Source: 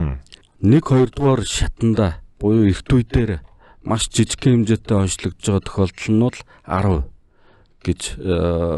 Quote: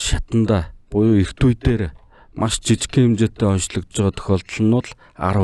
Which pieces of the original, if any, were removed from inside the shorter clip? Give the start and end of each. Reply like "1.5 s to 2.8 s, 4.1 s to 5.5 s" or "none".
none

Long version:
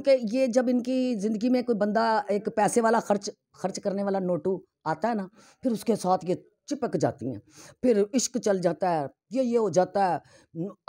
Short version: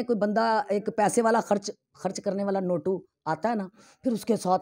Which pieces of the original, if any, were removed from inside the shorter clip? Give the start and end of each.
none

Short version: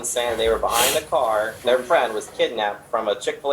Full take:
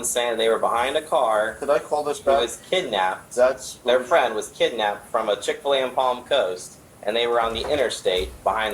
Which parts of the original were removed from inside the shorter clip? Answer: 1.5 s to 3.8 s

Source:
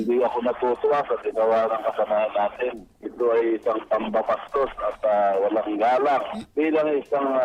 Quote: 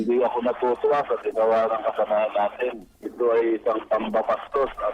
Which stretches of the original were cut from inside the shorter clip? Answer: none

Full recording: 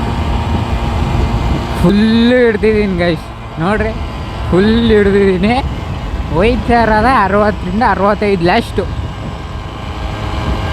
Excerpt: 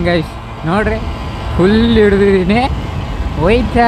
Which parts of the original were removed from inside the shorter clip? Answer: none

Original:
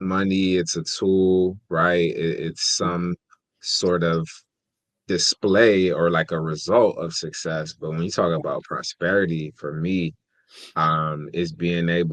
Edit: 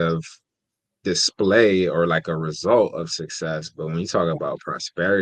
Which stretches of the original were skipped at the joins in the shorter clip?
none

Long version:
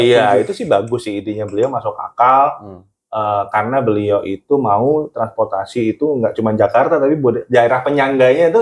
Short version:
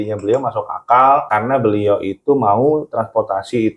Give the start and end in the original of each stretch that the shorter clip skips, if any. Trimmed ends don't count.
2.6 s to 3.5 s

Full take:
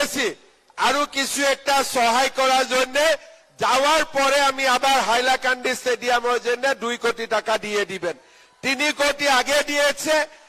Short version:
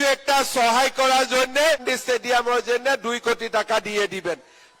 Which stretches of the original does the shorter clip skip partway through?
3.3 s to 5.7 s

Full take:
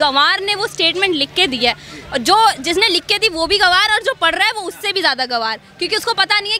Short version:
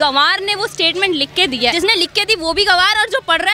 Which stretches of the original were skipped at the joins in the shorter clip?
1.8 s to 2.7 s

